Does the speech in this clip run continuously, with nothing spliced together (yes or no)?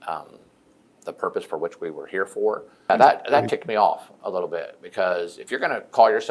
no